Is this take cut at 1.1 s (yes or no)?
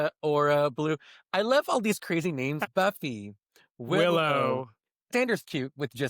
no